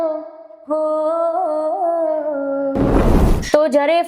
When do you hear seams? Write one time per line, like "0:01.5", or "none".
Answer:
0:03.0